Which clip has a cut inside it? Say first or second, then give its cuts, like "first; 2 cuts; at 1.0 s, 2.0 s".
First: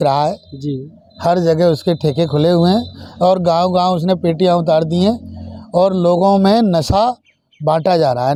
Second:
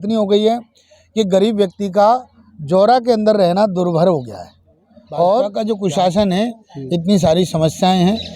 second; 1 cut; at 5.5 s